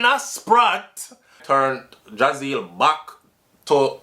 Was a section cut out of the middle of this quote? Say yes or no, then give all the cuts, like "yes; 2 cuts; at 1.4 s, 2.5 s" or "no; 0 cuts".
yes; 1 cut; at 1.4 s